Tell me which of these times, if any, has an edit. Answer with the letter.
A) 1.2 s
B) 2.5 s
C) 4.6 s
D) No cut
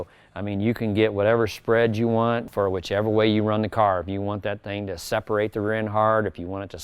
B